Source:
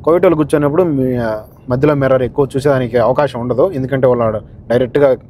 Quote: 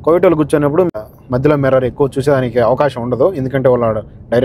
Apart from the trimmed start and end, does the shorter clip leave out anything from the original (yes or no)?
yes